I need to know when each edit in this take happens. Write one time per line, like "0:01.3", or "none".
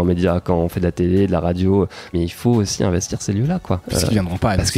0:02.1
0:03.8